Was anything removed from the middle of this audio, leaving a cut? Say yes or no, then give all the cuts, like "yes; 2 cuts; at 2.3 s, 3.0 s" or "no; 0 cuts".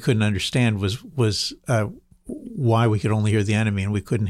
no; 0 cuts